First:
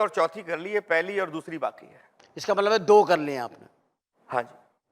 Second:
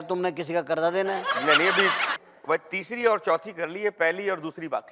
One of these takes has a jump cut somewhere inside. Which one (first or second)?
second